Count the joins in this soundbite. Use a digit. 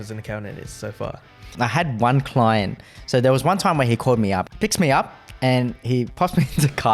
3